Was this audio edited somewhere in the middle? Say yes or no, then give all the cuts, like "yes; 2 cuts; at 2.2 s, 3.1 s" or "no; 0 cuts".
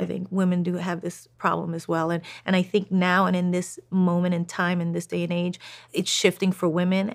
yes; 1 cut; at 5.9 s